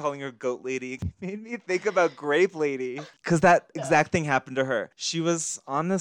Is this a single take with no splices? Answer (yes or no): no